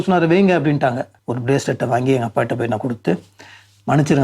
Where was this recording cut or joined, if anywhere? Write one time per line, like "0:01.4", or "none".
0:01.2